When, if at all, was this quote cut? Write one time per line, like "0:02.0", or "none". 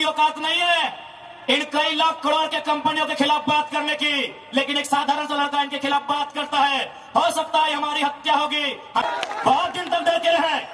0:09.0